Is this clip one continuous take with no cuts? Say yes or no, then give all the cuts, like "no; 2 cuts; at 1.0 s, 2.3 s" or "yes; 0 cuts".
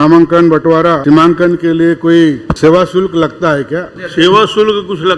no; 3 cuts; at 1.0 s, 2.5 s, 4.0 s